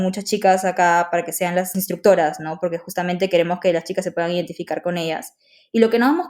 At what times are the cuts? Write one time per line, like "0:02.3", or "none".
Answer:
0:01.7

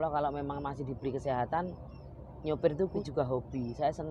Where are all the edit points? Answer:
0:03.0

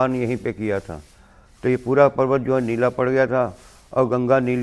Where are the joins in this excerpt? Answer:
none

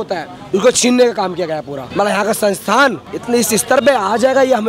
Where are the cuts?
0:01.8
0:03.1

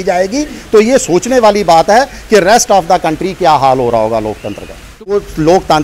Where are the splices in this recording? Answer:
0:04.9

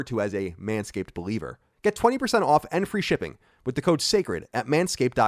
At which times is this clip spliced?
0:01.6

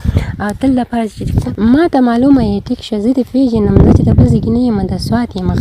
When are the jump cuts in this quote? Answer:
0:01.4

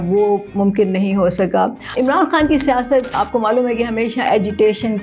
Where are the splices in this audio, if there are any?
0:01.9
0:03.2

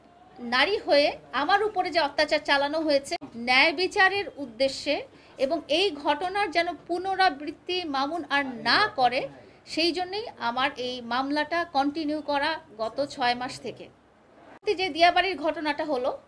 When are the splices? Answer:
0:03.3
0:14.6

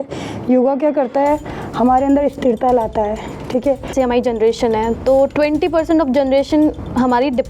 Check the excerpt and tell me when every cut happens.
0:03.9

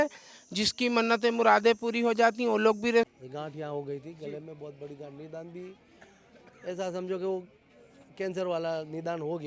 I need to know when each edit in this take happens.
0:03.1

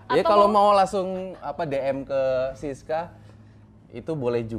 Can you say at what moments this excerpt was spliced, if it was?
none

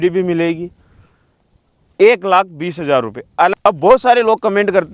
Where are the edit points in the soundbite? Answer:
0:03.5

